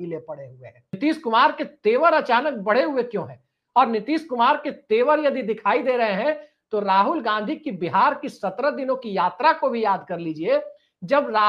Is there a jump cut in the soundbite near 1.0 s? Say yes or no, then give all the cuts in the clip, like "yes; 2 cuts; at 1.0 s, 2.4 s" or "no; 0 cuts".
yes; 1 cut; at 1.0 s